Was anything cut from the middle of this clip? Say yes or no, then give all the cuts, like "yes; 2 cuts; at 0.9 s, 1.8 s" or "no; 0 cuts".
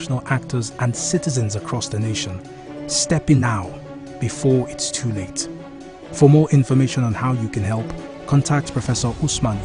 yes; 1 cut; at 3.3 s